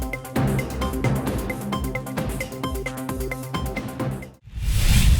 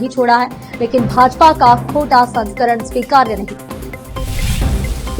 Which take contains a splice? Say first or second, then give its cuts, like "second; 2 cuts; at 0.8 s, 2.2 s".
first; 1 cut; at 4.3 s